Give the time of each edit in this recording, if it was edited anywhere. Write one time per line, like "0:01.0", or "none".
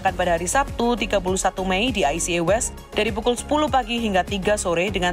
none